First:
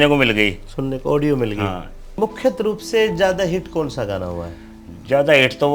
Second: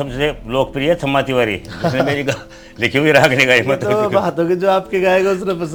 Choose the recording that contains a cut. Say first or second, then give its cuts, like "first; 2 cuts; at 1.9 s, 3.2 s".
first; 1 cut; at 2.2 s